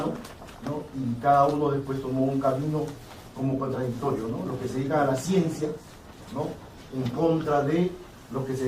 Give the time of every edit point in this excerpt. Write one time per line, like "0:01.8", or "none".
0:07.6